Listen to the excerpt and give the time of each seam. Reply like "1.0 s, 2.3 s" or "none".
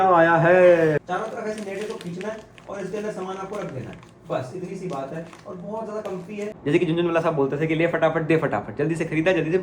1.1 s, 6.5 s